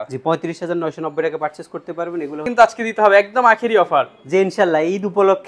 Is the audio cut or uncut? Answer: cut